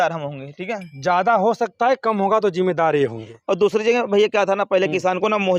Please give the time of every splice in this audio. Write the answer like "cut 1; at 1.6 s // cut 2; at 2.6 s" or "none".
none